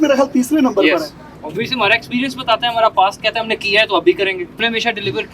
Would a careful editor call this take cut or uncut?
cut